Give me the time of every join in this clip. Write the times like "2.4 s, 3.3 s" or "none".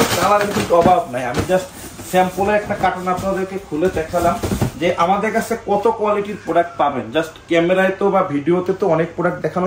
none